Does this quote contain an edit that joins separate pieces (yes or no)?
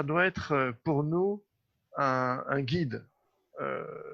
no